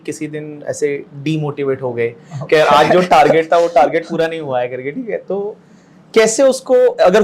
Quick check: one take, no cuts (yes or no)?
yes